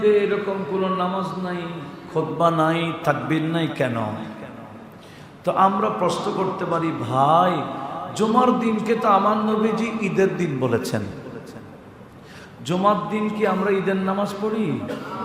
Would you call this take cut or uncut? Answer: uncut